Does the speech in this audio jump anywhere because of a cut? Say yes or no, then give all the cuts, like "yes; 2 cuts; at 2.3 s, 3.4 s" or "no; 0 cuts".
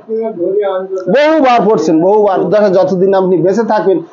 yes; 1 cut; at 2.4 s